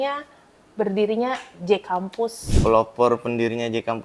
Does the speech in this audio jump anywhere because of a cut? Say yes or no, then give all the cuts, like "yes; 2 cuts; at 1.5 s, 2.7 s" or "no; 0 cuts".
yes; 1 cut; at 2.5 s